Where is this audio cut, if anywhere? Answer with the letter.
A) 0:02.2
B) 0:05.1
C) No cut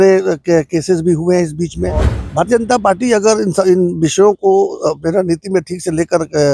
A